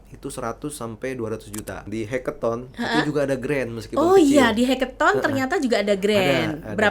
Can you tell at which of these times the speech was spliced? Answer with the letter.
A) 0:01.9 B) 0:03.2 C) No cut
A